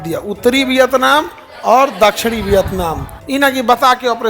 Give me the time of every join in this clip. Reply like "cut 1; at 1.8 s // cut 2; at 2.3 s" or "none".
cut 1; at 3.1 s